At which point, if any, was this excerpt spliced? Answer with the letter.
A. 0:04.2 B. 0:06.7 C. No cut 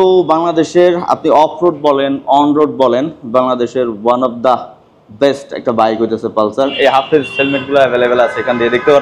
B